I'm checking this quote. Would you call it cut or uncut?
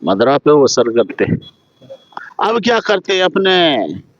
cut